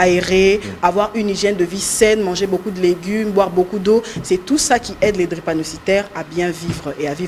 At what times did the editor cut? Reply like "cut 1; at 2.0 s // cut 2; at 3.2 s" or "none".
none

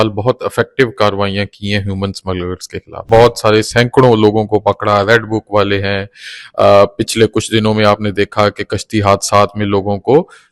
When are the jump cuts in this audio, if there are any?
cut 1; at 3.1 s

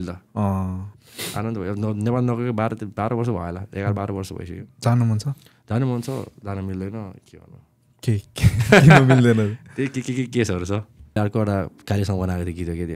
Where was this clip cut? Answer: cut 1; at 0.9 s // cut 2; at 11.2 s

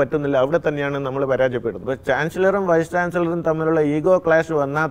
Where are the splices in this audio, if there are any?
cut 1; at 1.8 s

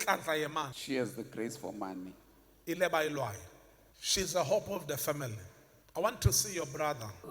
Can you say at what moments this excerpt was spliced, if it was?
cut 1; at 5.8 s

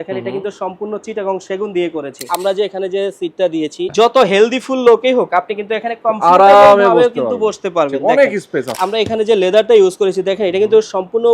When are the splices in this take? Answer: cut 1; at 2.3 s // cut 2; at 3.9 s // cut 3; at 8.7 s

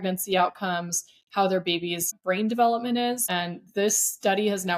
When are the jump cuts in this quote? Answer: cut 1; at 2.2 s // cut 2; at 3.2 s

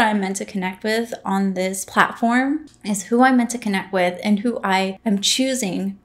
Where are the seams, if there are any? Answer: cut 1; at 1.8 s // cut 2; at 2.7 s // cut 3; at 5.0 s

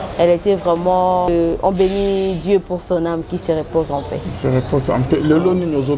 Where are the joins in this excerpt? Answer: cut 1; at 1.3 s

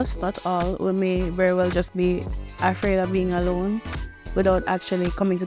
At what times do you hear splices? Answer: none

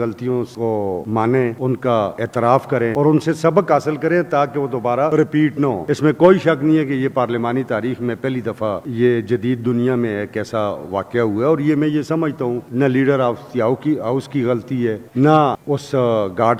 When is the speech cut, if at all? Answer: none

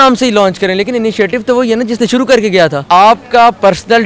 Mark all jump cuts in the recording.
cut 1; at 2.8 s

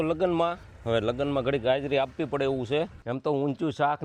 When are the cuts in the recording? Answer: cut 1; at 3.0 s

